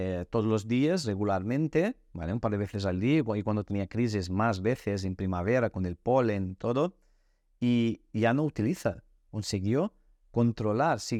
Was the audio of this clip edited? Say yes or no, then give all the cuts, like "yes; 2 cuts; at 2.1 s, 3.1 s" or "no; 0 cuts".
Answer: no; 0 cuts